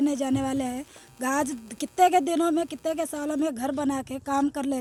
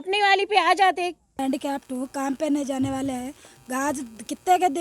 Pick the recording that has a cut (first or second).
second